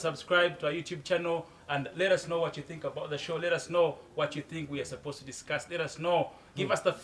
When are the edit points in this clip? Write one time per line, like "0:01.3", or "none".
none